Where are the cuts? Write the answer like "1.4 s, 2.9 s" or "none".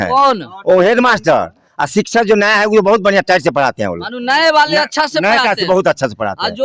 none